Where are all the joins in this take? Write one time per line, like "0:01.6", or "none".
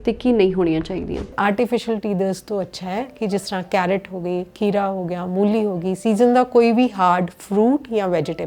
0:01.3